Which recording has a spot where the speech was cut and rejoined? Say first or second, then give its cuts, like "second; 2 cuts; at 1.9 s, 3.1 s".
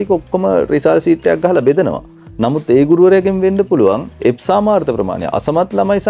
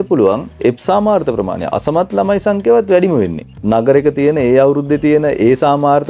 second; 1 cut; at 3.5 s